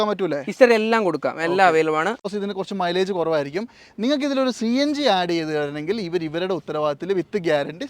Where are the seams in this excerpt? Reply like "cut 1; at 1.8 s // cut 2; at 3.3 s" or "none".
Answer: cut 1; at 2.3 s